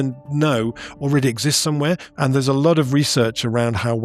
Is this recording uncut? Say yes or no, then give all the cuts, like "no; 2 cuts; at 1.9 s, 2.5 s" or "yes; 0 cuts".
no; 1 cut; at 2.1 s